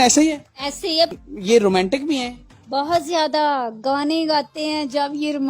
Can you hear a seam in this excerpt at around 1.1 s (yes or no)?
yes